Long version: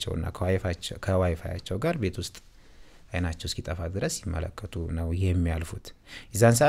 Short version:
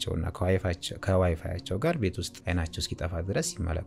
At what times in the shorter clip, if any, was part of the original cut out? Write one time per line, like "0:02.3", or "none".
0:02.3